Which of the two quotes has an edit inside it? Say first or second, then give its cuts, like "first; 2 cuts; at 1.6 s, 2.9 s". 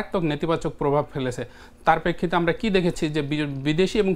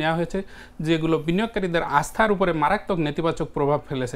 second; 1 cut; at 1.8 s